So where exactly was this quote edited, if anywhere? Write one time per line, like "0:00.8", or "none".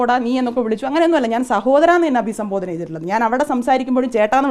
none